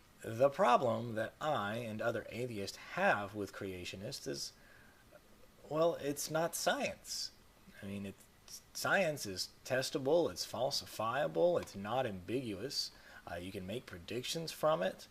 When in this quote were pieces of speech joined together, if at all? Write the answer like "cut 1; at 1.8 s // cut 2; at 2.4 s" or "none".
cut 1; at 1.4 s